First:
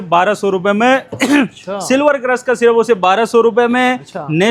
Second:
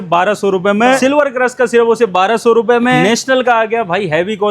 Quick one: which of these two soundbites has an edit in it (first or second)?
second